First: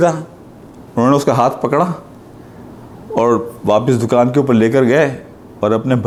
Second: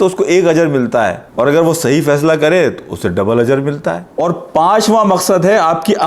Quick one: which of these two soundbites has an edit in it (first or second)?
second